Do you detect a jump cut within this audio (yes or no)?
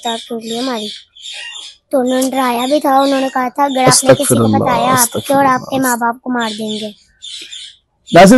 no